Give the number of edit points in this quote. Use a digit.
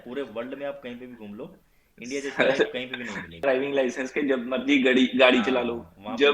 1